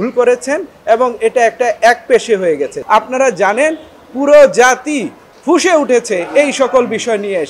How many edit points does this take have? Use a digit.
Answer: 1